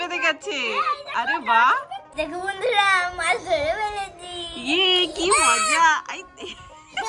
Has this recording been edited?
yes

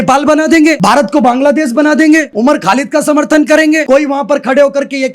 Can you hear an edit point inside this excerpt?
yes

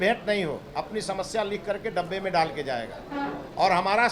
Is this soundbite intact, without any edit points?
yes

